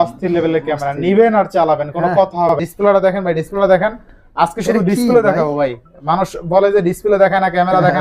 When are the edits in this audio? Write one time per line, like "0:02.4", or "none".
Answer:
0:02.5

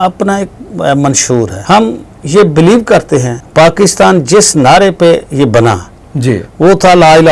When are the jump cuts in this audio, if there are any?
0:01.6
0:03.4

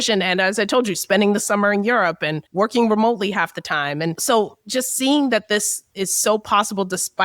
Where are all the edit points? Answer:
0:04.2

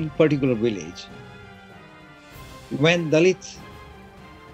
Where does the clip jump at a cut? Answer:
none

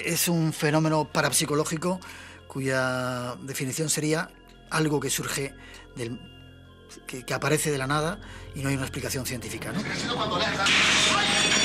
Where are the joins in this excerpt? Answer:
0:09.9

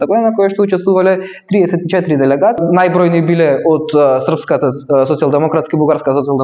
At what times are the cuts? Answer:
0:02.6

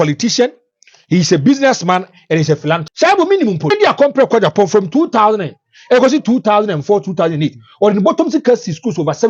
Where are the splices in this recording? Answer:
0:02.9
0:03.7

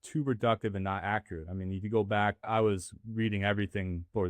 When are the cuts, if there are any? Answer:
0:02.5

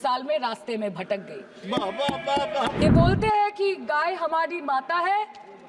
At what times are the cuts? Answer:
0:02.8

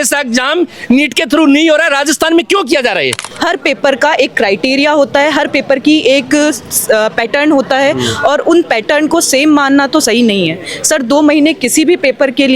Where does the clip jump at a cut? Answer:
0:03.2

